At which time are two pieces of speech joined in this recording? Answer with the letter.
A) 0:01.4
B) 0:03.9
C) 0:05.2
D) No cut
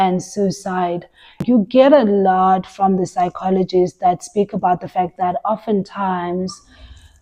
A